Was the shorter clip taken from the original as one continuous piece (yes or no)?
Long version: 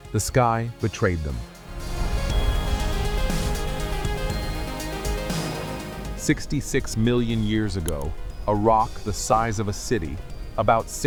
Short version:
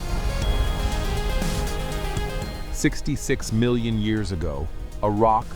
no